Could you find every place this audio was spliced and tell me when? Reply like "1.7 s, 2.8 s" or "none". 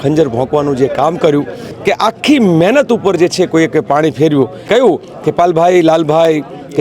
1.6 s, 4.7 s